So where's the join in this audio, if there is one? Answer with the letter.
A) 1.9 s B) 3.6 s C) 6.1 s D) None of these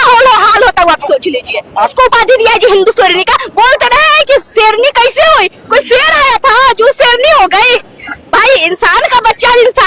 A